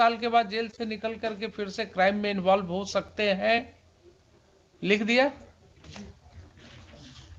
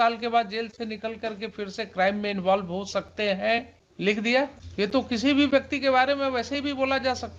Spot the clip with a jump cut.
second; 2 cuts; at 3.8 s, 4.6 s

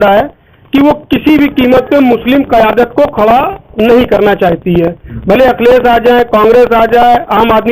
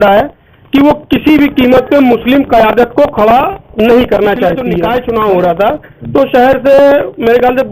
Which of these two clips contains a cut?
second; 1 cut; at 4.7 s

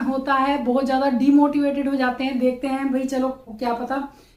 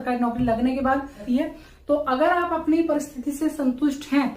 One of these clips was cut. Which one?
second; 1 cut; at 1.2 s

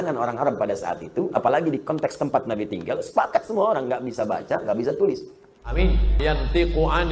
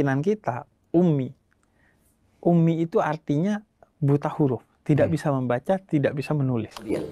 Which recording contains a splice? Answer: first; 1 cut; at 6.2 s

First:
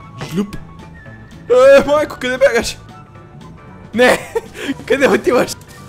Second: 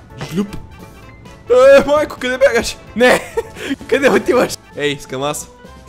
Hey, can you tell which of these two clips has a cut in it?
second; 2 cuts; at 2.8 s, 4.6 s

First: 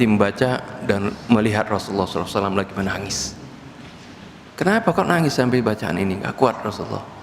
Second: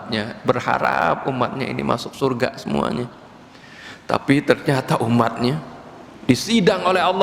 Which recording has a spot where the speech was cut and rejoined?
first; 1 cut; at 4.5 s

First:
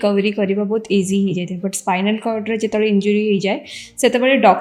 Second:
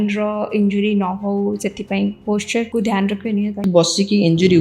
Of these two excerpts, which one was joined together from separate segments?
second; 2 cuts; at 2.7 s, 3.6 s

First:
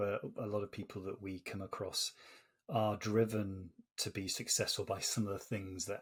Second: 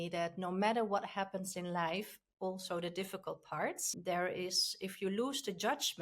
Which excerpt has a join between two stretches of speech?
second; 1 cut; at 3.9 s

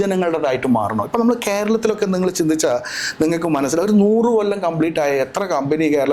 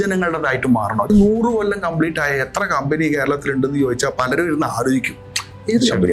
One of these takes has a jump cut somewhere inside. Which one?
second; 1 cut; at 1.1 s

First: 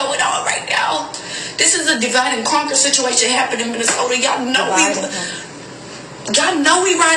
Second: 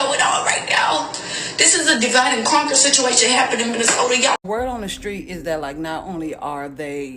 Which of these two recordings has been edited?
second; 1 cut; at 4.4 s

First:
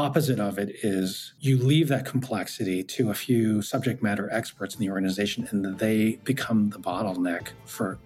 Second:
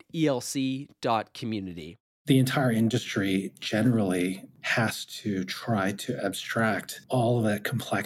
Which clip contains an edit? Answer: second; 2 cuts; at 2.1 s, 6.9 s

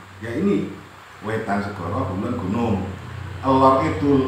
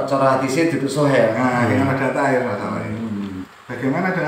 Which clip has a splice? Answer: second; 1 cut; at 3.4 s

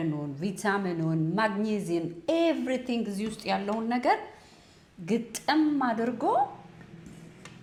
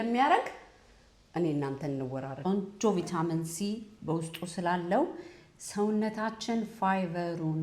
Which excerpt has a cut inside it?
second; 1 cut; at 2.3 s

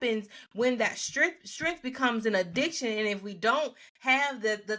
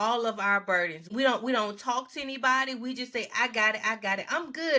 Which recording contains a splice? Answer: second; 1 cut; at 1.1 s

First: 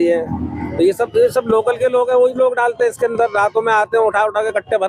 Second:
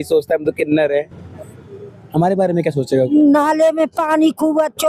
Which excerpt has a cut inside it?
second; 1 cut; at 3.1 s

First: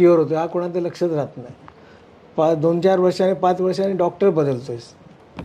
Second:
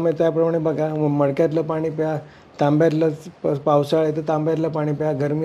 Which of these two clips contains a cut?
first; 1 cut; at 1.6 s

